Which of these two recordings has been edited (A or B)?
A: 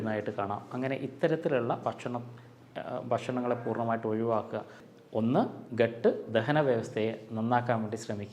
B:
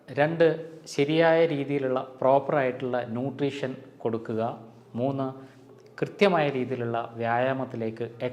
A